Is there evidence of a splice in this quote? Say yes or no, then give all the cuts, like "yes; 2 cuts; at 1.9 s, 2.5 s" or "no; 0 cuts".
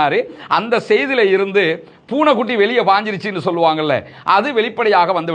no; 0 cuts